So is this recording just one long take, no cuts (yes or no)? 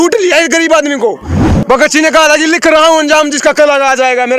yes